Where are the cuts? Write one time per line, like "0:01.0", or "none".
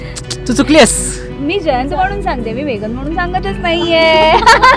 none